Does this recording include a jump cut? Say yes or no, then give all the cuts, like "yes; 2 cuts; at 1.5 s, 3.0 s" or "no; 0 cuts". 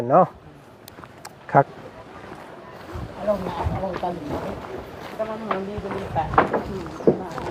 no; 0 cuts